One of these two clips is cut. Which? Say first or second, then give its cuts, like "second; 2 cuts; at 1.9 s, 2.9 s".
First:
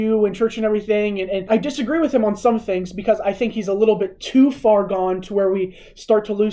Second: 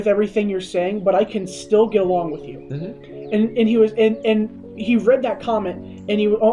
first; 1 cut; at 1.5 s